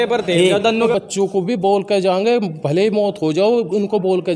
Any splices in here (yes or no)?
yes